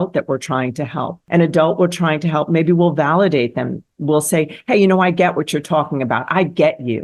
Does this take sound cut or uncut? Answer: cut